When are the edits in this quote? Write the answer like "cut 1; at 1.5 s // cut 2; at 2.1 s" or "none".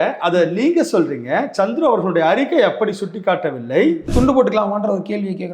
cut 1; at 4.1 s